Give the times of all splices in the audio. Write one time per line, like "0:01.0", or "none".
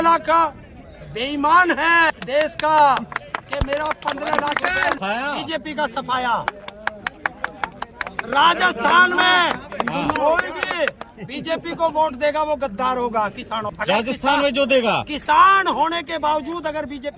0:02.1
0:05.0
0:13.7